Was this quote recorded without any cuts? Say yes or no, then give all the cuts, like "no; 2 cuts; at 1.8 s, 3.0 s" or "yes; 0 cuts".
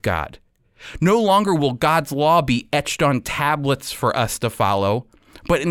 yes; 0 cuts